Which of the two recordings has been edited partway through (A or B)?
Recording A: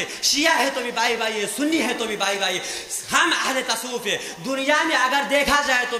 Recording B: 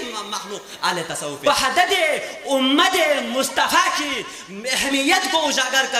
B